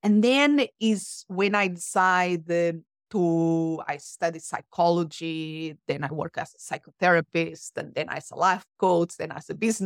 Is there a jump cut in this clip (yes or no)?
no